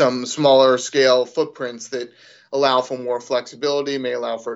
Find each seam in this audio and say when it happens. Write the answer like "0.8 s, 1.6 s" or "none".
none